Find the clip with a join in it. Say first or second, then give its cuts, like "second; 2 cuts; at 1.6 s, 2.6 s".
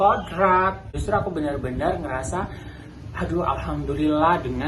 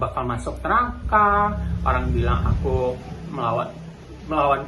first; 1 cut; at 0.9 s